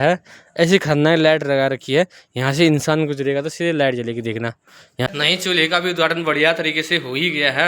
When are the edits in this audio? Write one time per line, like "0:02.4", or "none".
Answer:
0:05.1